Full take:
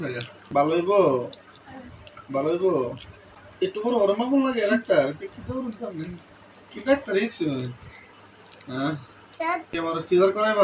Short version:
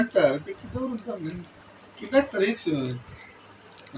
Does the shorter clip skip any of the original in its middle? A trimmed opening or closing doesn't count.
no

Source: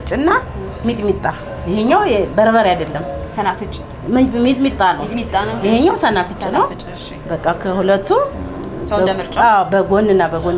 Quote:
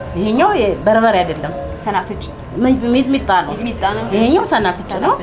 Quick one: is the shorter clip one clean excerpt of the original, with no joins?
yes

